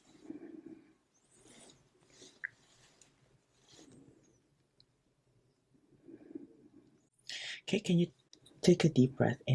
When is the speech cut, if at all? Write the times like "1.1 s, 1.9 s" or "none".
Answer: none